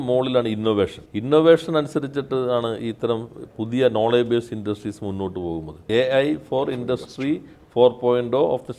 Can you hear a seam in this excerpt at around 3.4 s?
no; 2 cuts; at 1.1 s, 5.8 s

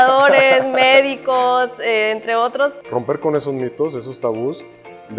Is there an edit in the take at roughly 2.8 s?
yes; 1 cut; at 2.8 s

